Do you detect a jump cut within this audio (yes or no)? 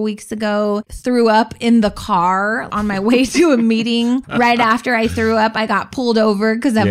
yes